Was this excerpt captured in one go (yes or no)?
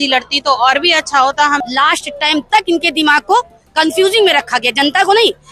no